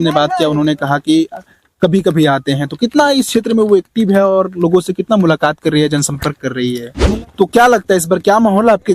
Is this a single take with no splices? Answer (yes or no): no